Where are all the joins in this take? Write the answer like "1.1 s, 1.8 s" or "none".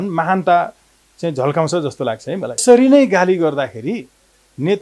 2.6 s

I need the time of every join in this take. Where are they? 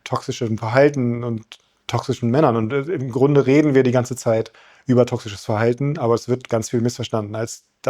none

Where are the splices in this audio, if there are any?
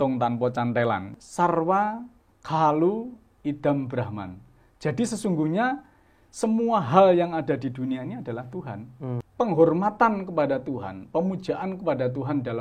1.1 s, 9.3 s

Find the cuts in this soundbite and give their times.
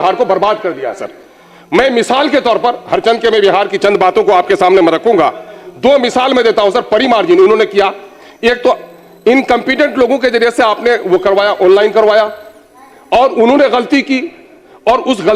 none

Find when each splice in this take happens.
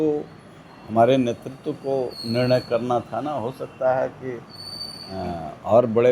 none

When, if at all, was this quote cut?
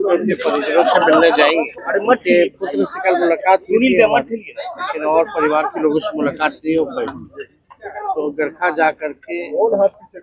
1.8 s

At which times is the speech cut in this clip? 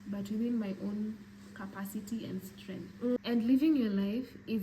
3.2 s

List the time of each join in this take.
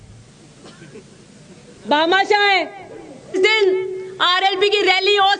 3.3 s

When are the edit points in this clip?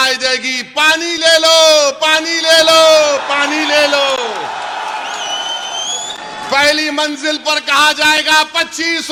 none

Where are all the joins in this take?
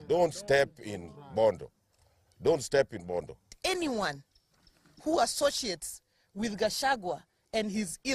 3.5 s

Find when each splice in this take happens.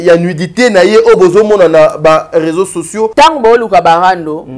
3.1 s

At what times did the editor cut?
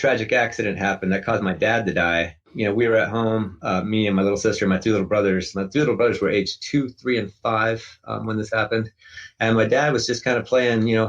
2.4 s

